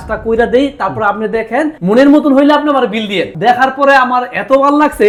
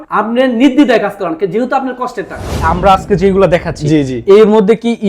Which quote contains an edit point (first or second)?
second